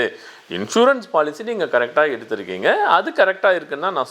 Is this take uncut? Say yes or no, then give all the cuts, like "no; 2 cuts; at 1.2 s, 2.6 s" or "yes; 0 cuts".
yes; 0 cuts